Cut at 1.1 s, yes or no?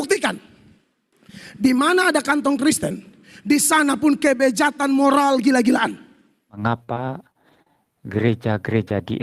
no